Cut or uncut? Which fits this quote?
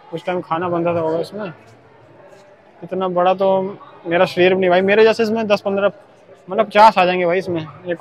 uncut